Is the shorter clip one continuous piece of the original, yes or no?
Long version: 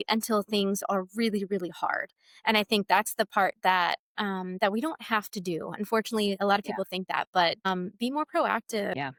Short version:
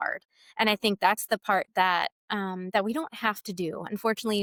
yes